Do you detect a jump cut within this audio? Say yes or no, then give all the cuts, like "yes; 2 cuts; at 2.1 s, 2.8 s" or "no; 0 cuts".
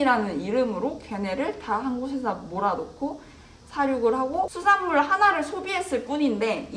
yes; 1 cut; at 4.5 s